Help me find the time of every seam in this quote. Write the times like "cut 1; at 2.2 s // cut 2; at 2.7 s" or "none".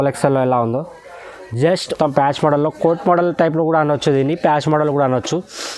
cut 1; at 1.9 s

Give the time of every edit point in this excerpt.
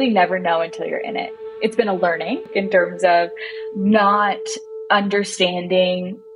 cut 1; at 1.3 s // cut 2; at 2.5 s

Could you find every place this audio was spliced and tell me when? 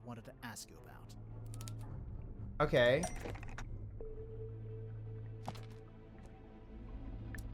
none

